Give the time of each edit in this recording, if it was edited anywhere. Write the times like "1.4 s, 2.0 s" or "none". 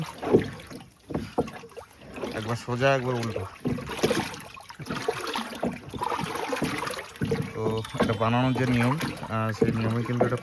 none